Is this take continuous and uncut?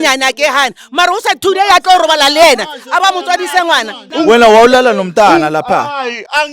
no; 1 cut; at 4.0 s

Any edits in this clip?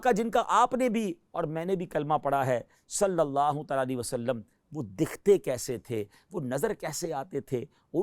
no; 0 cuts

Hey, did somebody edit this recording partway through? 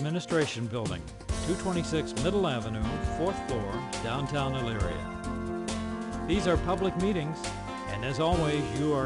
no; 0 cuts

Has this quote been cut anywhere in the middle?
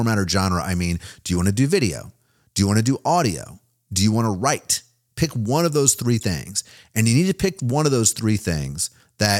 no; 0 cuts

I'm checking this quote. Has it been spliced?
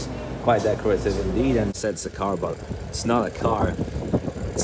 yes; 1 cut; at 1.7 s

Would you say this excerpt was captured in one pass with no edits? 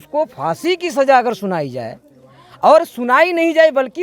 yes; 0 cuts

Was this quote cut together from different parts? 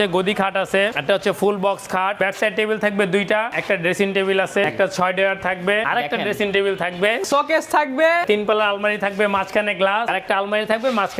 yes; 8 cuts; at 0.9 s, 2.2 s, 3.5 s, 4.7 s, 5.8 s, 7.3 s, 8.2 s, 10.1 s

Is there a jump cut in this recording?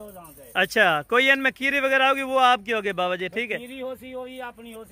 no; 0 cuts

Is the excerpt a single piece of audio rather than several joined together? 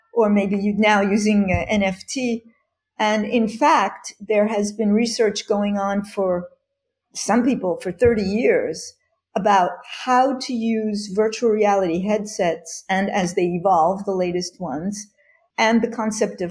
no; 1 cut; at 15.4 s

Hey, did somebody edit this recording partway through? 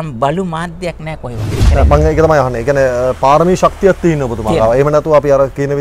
yes; 1 cut; at 1.6 s

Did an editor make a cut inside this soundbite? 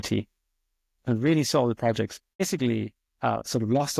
yes; 1 cut; at 2.2 s

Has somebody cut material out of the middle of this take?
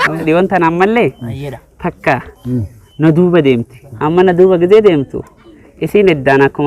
no; 0 cuts

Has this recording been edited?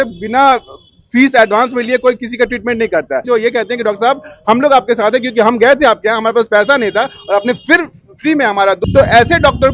yes; 2 cuts; at 3.2 s, 8.8 s

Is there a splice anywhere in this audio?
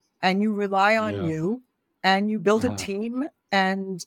no; 0 cuts

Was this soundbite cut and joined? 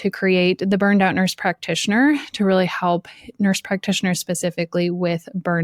no; 0 cuts

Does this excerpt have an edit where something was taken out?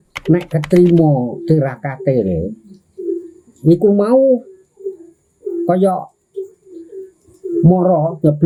no; 0 cuts

